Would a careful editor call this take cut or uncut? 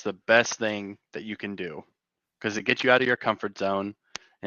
uncut